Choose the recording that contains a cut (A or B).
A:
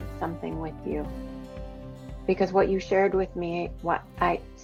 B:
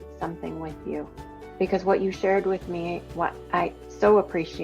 B